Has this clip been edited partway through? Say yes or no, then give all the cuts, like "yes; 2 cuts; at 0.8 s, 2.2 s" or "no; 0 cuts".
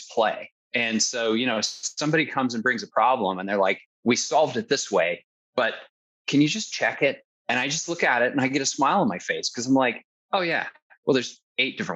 yes; 3 cuts; at 3.9 s, 6.1 s, 7.3 s